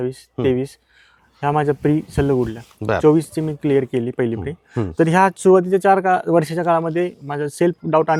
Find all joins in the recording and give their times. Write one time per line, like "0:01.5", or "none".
none